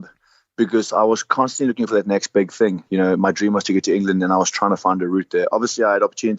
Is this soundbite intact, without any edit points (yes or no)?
yes